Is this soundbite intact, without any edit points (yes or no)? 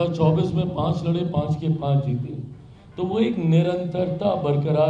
yes